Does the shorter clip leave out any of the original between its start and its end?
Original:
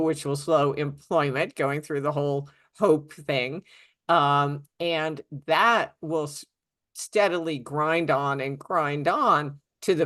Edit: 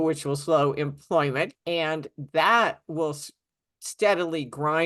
yes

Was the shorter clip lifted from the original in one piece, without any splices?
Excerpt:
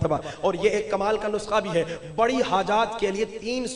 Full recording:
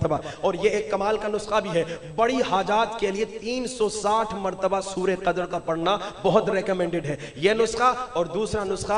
yes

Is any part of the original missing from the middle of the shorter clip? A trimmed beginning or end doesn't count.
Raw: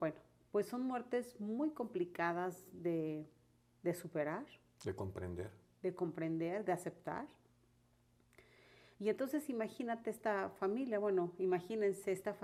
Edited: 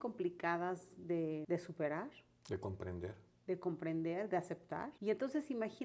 yes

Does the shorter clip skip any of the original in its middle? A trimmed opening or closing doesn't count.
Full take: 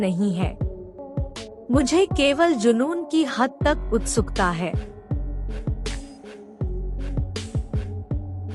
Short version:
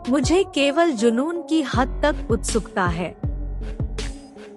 yes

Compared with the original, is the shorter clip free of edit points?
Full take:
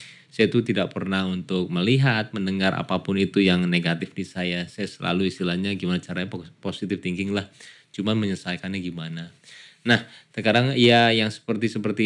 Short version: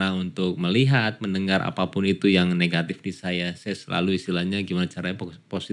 yes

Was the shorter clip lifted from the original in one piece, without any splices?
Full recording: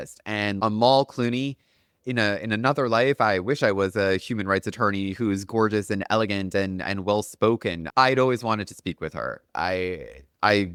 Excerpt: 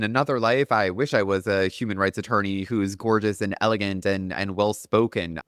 yes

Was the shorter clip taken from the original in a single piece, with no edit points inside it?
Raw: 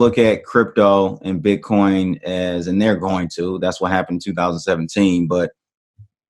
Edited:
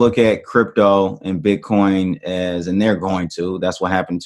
yes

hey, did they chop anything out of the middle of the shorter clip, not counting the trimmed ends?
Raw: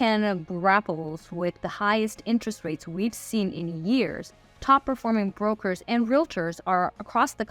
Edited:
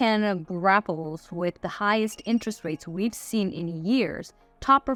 no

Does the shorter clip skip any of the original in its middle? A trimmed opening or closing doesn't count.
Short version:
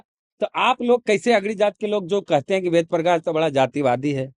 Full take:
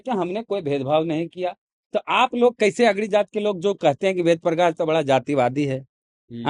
no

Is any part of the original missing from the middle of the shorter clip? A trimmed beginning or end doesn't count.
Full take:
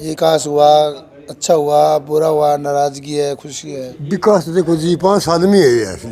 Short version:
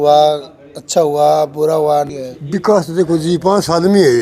yes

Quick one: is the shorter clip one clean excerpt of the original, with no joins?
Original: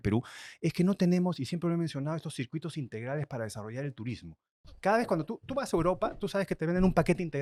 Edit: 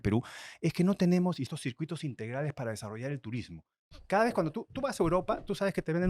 no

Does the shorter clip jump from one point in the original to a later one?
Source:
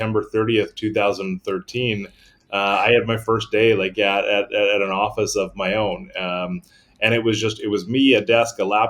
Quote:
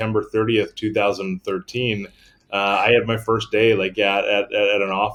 no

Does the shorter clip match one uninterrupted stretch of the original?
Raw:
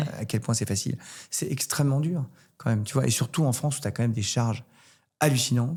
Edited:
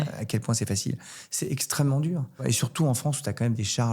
no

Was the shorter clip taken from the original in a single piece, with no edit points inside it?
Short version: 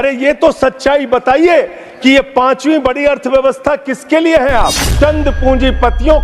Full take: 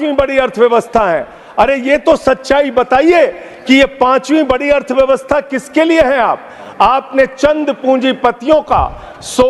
no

